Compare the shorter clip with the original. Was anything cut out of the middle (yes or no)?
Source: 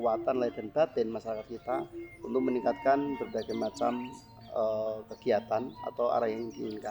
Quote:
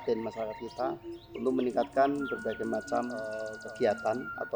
yes